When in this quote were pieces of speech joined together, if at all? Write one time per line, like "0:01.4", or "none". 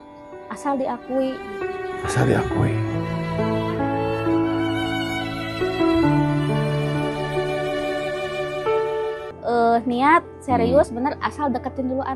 0:09.3

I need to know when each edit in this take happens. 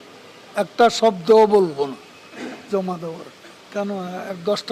0:03.6

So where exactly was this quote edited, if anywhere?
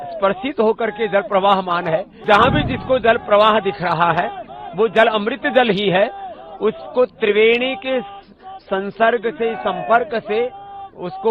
0:02.1

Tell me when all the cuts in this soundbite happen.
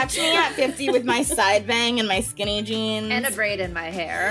0:03.2

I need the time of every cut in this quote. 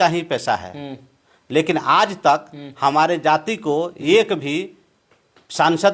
none

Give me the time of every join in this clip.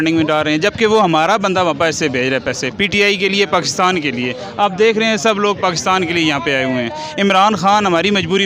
none

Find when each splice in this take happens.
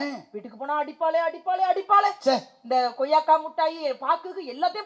0:02.2

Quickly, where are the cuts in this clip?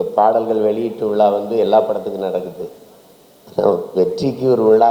none

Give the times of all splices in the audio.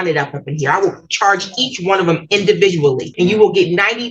0:03.1

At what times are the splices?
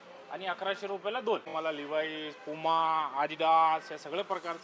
0:01.5

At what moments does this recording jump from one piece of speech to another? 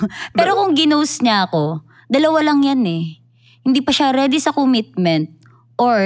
none

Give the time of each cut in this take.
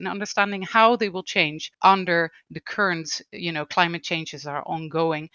0:01.6

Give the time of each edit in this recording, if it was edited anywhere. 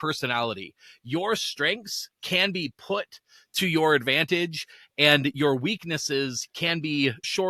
none

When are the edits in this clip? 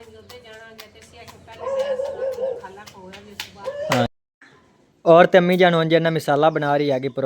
0:04.1

